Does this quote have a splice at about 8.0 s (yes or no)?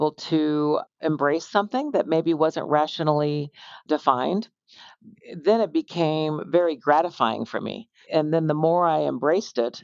yes